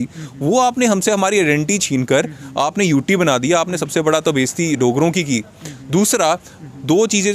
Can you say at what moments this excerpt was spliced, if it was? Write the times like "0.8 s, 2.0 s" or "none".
none

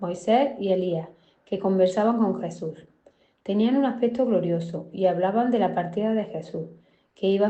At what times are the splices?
none

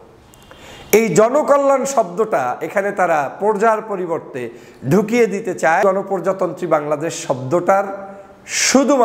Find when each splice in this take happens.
5.8 s

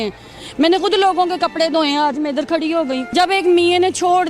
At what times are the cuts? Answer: 3.1 s

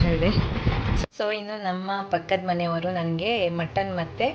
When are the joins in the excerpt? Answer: 1.0 s

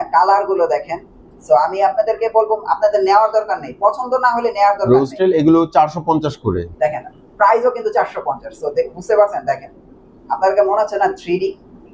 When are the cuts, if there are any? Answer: none

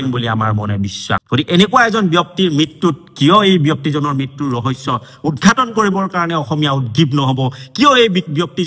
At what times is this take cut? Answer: 1.2 s

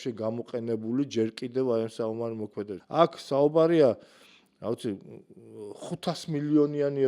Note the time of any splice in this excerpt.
2.8 s

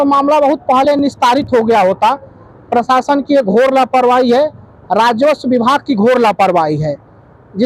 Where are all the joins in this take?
none

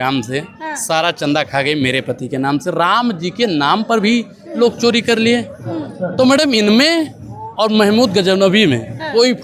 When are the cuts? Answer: none

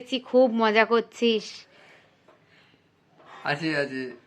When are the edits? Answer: none

